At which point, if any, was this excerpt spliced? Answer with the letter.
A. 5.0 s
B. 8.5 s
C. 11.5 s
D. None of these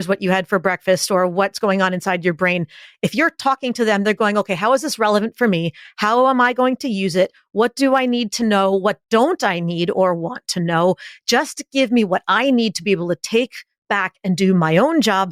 D